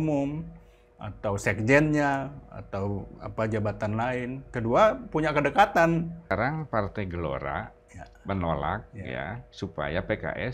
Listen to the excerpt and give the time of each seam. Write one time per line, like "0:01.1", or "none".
0:06.3

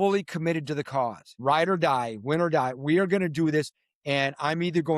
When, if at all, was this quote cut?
0:01.3

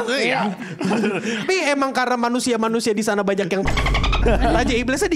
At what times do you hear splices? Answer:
0:01.4

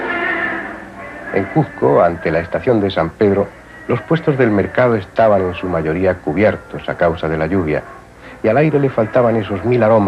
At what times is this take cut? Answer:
0:05.1

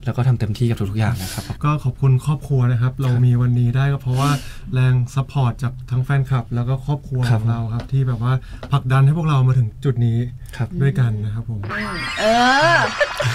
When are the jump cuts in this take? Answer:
0:01.4
0:11.7

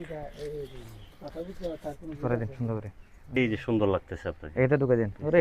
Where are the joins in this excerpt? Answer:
0:03.4

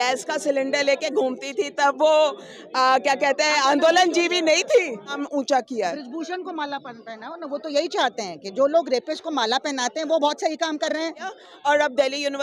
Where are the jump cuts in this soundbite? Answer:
0:05.2
0:11.3

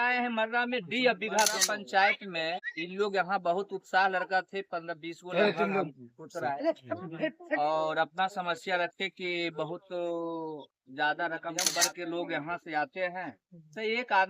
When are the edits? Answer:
0:01.6
0:02.6
0:11.7

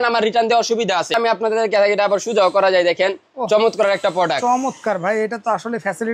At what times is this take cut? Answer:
0:01.1

